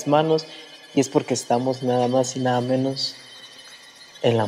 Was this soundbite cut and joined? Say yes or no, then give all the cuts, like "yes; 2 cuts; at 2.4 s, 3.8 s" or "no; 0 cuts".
no; 0 cuts